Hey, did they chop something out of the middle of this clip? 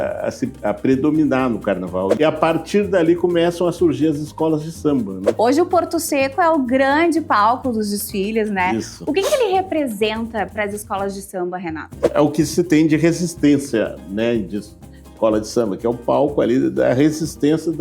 yes; 3 cuts; at 2.2 s, 5.2 s, 12.0 s

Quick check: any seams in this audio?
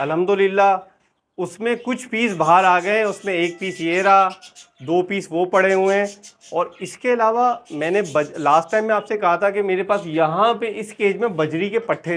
no; 0 cuts

